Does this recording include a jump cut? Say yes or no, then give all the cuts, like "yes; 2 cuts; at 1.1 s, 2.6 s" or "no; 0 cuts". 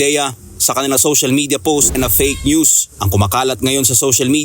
yes; 1 cut; at 1.9 s